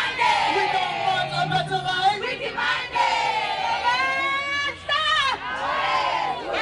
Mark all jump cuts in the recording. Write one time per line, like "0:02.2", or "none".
0:05.1